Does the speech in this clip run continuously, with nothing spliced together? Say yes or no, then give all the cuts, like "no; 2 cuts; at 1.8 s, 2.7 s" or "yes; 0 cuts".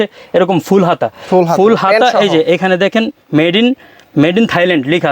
yes; 0 cuts